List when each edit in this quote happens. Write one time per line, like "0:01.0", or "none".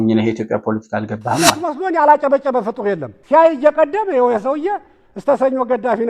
0:01.7